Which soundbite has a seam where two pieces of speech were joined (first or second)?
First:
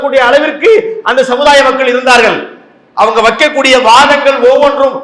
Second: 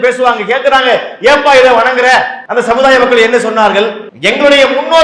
second